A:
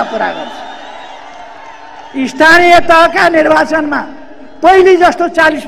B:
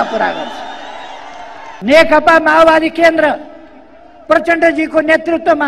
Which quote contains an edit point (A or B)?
B